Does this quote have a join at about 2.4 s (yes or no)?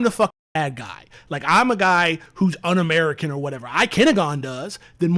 no